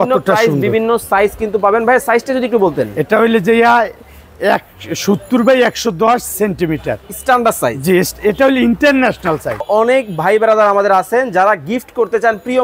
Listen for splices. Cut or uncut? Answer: cut